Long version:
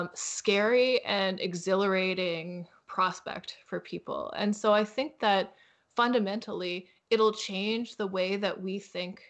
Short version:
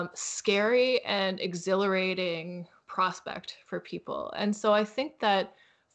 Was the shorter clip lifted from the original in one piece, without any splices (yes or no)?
yes